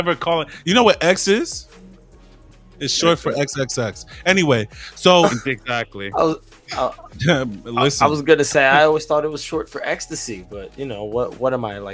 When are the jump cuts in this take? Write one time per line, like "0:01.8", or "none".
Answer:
none

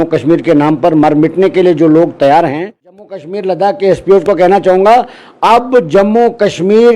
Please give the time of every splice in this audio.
0:03.0

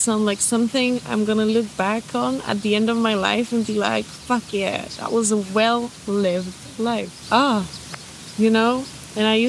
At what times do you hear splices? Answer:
0:07.1

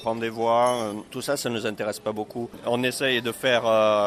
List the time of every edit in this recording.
0:01.1
0:02.5

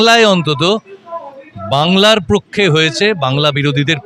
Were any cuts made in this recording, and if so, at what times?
none

